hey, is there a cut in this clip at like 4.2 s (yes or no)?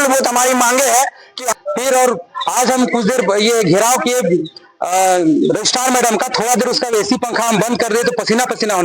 no